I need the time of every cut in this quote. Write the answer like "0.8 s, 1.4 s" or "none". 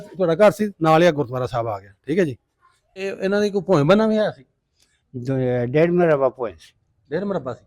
3.0 s